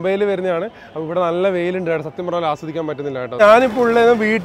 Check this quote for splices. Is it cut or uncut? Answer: cut